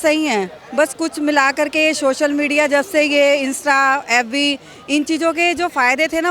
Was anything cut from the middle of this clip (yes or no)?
no